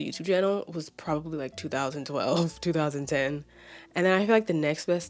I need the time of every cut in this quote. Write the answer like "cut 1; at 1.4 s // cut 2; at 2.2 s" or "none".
none